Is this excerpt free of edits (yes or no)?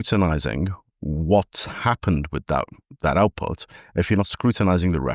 yes